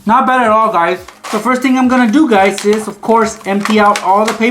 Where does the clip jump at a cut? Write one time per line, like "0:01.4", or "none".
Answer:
0:01.2